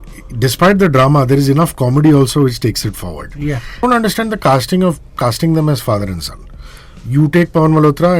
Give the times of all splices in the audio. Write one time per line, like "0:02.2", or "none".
0:03.8